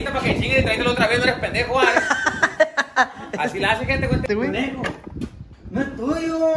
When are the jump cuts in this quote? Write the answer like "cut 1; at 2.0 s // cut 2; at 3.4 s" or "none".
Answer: cut 1; at 4.2 s